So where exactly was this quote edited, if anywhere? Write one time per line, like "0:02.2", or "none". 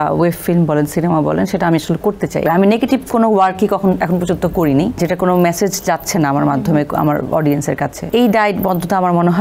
0:02.5
0:05.0
0:08.0